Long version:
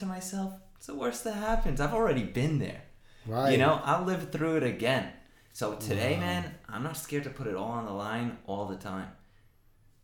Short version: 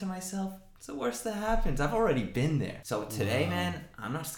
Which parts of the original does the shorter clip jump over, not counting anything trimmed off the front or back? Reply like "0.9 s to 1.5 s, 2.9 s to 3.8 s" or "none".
2.8 s to 5.5 s